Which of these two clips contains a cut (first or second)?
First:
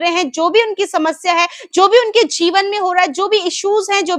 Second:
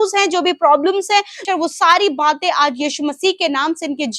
second